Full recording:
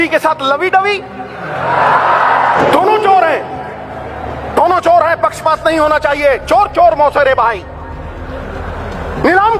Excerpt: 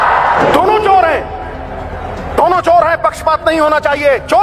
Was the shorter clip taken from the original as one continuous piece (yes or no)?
yes